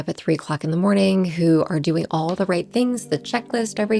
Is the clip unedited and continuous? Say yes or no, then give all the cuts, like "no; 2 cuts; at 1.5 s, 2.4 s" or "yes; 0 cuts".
yes; 0 cuts